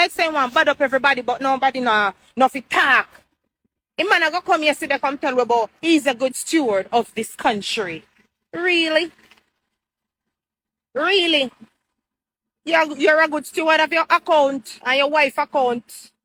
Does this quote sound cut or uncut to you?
uncut